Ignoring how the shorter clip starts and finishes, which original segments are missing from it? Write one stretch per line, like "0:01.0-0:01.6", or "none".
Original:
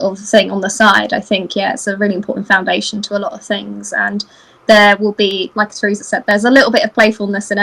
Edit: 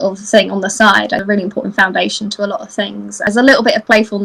0:01.2-0:02.0
0:04.0-0:06.3